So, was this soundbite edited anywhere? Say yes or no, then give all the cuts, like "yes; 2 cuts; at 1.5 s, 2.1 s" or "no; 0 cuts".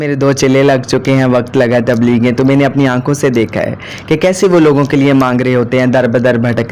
no; 0 cuts